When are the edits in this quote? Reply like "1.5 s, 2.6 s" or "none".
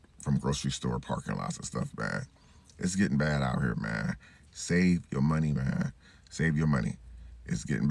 none